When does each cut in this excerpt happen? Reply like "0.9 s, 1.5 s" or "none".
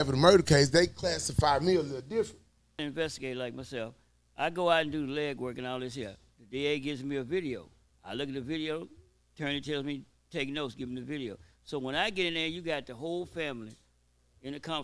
2.8 s